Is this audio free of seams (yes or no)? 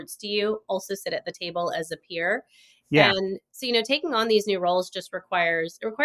yes